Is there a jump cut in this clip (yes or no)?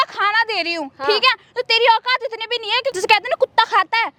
no